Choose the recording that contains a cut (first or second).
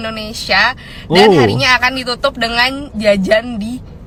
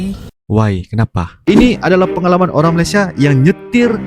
second